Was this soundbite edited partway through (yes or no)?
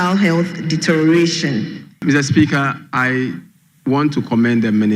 yes